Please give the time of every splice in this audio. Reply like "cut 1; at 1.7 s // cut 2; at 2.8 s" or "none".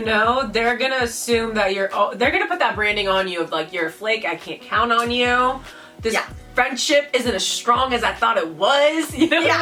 none